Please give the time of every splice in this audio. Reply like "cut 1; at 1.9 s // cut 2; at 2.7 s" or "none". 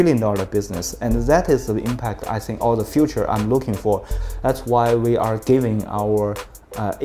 cut 1; at 4.1 s